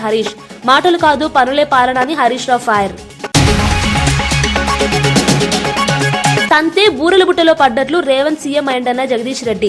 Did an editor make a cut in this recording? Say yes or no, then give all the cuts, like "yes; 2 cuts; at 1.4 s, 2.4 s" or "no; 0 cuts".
yes; 1 cut; at 3.1 s